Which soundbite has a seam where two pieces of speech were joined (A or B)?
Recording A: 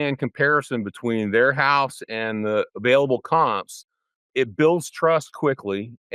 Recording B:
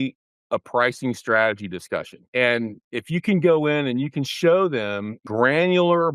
B